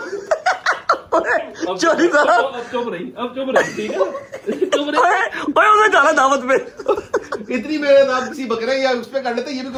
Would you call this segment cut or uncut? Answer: uncut